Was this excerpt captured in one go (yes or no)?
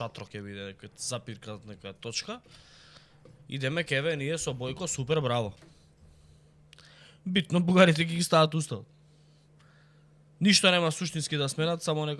yes